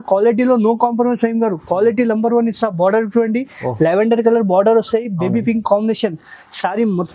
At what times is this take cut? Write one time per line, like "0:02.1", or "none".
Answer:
none